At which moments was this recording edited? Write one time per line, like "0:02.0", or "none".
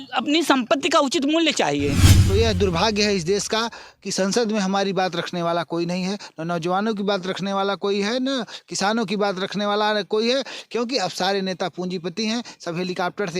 0:02.1